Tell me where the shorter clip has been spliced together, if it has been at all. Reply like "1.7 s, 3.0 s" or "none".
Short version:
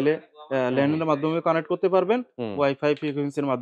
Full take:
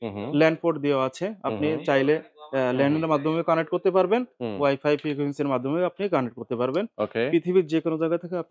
none